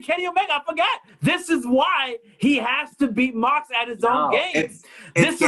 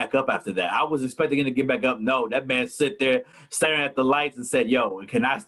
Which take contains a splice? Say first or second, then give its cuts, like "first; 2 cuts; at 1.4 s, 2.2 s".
first; 1 cut; at 1.1 s